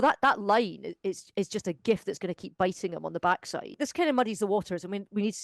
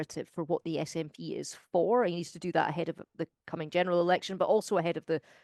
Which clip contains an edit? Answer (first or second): first